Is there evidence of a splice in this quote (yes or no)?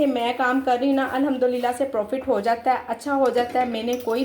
no